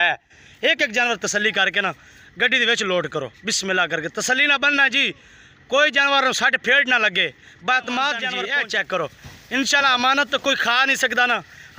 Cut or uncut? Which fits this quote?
uncut